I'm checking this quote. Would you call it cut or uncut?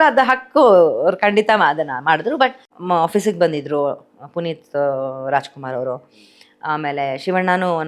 cut